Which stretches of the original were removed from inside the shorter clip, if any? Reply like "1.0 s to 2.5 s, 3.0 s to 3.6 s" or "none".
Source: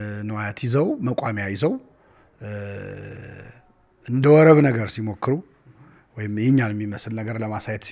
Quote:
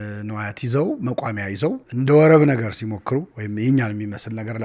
1.9 s to 4.0 s, 5.5 s to 6.2 s